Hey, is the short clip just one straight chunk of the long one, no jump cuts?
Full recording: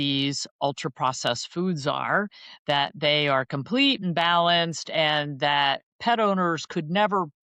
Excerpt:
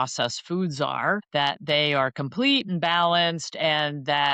no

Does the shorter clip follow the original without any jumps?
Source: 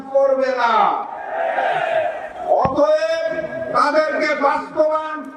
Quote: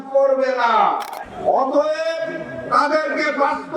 no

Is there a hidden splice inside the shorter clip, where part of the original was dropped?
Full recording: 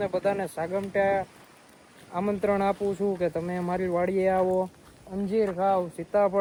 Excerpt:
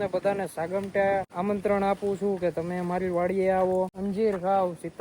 yes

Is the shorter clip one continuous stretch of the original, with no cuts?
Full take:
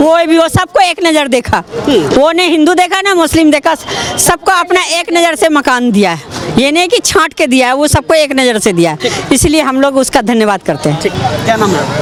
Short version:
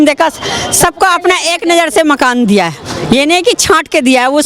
yes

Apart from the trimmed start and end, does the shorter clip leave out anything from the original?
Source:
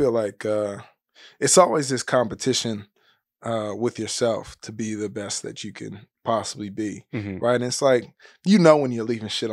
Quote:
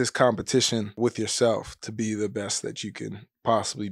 yes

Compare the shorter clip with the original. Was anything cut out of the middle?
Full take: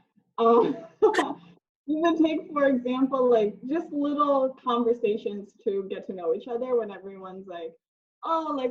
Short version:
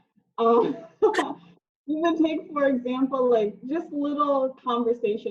no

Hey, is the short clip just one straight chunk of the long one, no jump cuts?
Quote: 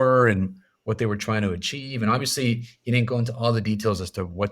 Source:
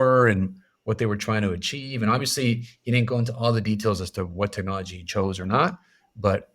yes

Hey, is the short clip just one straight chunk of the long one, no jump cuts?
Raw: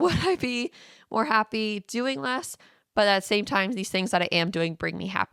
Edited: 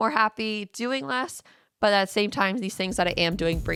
yes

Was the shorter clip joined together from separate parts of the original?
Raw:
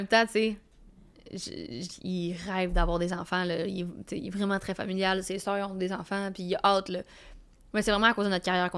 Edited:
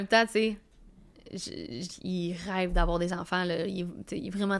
no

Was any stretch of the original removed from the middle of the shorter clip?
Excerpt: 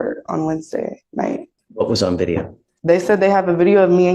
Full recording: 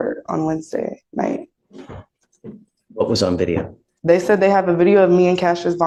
yes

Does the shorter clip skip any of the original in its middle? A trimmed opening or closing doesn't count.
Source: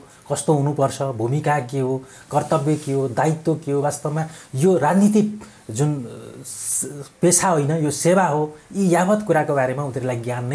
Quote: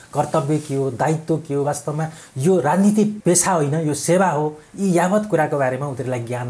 yes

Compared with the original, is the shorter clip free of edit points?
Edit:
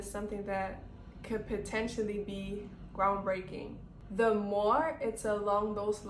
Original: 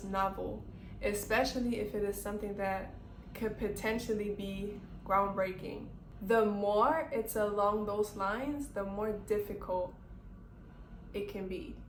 yes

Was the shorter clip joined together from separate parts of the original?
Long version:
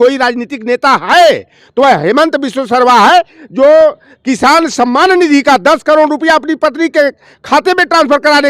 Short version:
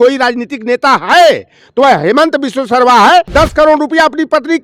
yes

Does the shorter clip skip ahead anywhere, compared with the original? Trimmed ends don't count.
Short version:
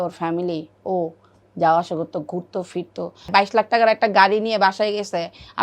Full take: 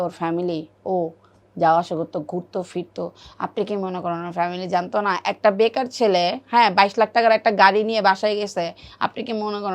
yes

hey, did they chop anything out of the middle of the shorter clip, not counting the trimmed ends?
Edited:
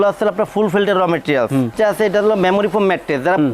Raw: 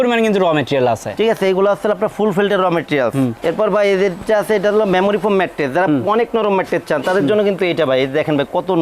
yes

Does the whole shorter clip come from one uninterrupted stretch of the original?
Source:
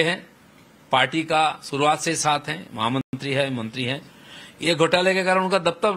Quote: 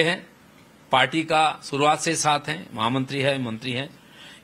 no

